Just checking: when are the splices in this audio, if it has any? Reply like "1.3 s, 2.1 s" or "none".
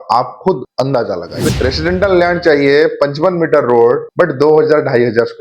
1.5 s